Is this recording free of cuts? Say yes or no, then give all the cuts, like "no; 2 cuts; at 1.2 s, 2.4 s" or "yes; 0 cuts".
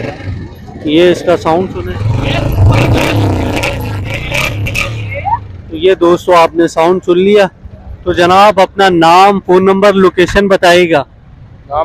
yes; 0 cuts